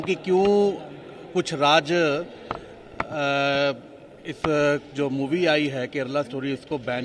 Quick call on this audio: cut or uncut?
uncut